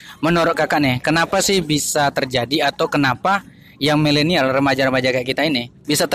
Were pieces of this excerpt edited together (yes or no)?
no